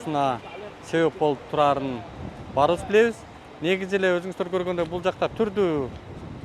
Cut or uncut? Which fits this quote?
uncut